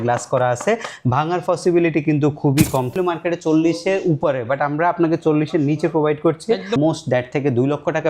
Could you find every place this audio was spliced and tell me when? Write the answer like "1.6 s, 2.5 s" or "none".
2.9 s, 6.8 s